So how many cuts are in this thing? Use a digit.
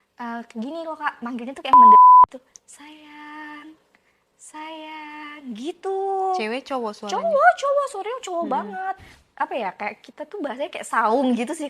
3